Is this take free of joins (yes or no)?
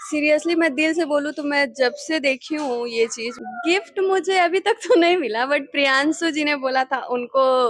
no